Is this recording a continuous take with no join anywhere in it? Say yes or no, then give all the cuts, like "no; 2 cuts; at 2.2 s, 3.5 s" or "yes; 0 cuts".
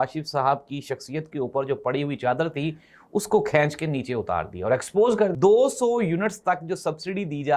no; 1 cut; at 5.3 s